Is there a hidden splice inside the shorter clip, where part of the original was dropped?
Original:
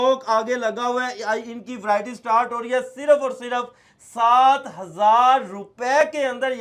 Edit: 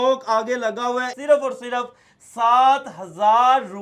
yes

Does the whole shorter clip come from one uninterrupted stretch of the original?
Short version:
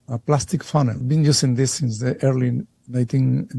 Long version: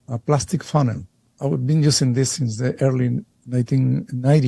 no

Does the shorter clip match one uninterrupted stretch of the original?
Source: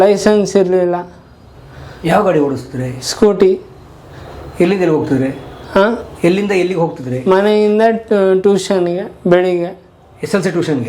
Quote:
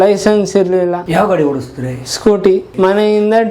no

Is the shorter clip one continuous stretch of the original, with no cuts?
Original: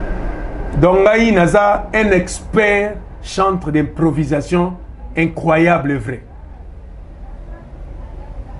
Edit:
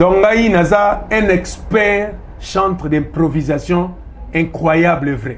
yes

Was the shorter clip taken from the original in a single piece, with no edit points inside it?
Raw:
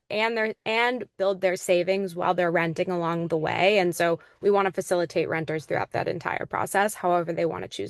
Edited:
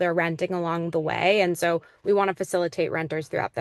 yes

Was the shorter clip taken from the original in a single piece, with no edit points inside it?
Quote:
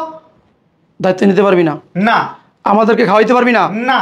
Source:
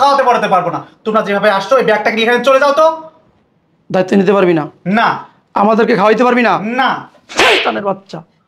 yes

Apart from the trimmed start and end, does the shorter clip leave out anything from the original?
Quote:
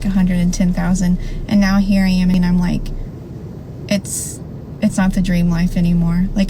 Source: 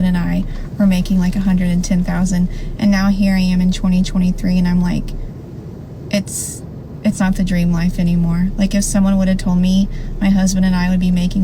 yes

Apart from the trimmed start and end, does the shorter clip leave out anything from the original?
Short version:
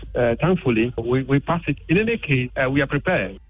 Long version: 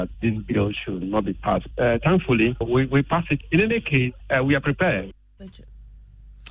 yes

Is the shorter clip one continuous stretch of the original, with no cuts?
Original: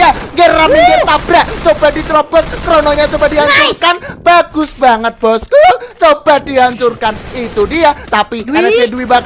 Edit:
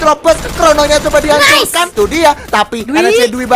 no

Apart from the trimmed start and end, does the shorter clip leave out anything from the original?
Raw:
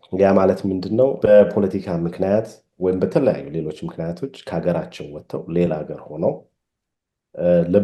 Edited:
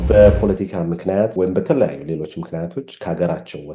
yes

